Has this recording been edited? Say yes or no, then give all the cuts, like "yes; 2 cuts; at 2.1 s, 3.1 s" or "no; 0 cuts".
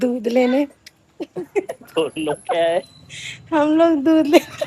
no; 0 cuts